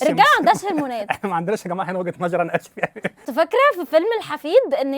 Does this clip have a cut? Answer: yes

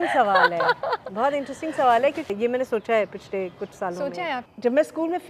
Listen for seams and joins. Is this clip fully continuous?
no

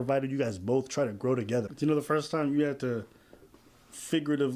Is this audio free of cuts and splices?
no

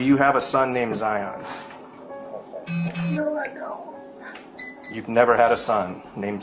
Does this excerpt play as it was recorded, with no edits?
yes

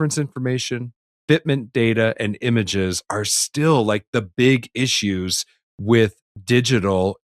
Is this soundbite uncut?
yes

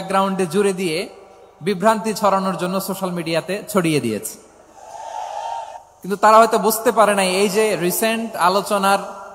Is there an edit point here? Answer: yes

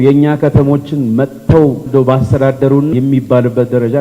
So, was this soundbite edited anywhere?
yes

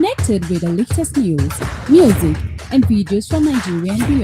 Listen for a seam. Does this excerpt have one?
yes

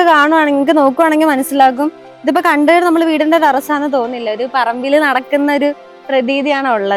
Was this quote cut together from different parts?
no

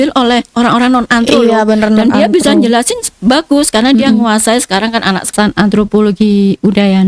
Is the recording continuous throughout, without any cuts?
no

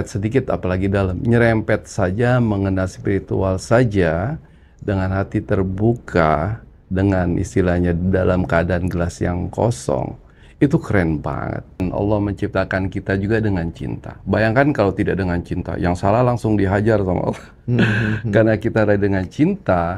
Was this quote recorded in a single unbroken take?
no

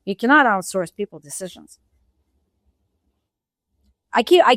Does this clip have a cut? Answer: no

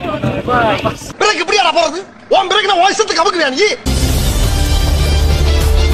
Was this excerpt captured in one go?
no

